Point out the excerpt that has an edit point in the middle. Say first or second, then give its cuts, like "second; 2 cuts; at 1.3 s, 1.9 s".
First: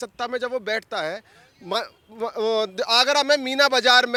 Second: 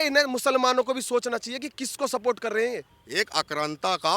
second; 1 cut; at 2.9 s